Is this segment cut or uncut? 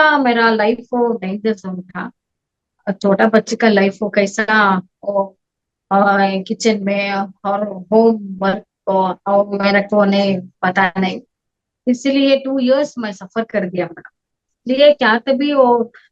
uncut